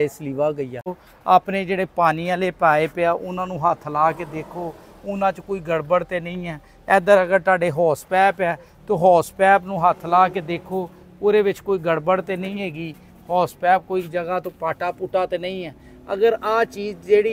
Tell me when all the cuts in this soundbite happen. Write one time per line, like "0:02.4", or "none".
0:01.1